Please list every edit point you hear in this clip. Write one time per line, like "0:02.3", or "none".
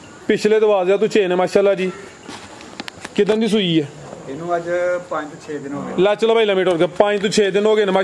none